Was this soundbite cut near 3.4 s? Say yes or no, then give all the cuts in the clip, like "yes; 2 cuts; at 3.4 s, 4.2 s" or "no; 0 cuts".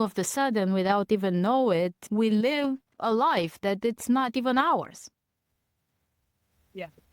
no; 1 cut; at 2.0 s